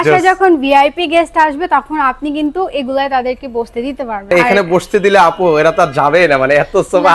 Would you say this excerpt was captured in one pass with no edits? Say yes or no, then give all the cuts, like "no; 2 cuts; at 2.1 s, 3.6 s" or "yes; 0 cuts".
no; 1 cut; at 4.3 s